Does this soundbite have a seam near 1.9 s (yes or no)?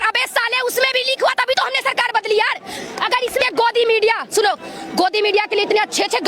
no